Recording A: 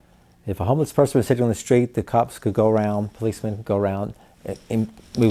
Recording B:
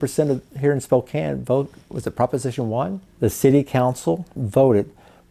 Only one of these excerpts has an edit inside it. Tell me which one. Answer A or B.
B